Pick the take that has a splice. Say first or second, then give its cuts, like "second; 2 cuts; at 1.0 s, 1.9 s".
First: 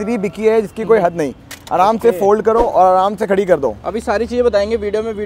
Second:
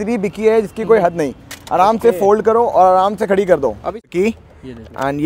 second; 1 cut; at 4.0 s